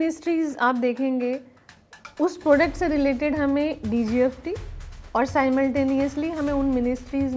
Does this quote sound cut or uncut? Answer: uncut